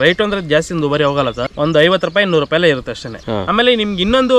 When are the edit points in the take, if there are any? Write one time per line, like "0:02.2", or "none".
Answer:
0:01.5
0:03.1

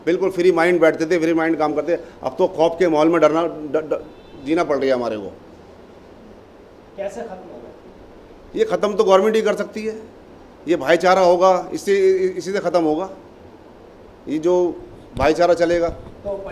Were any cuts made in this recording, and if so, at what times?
none

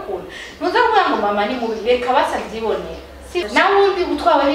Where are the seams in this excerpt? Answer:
0:03.5

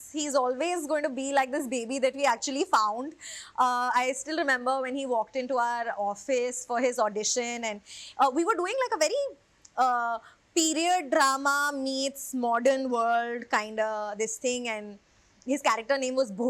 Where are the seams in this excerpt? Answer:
none

